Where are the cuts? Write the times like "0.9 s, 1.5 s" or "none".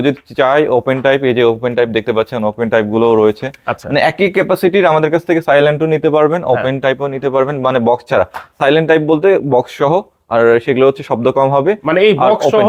none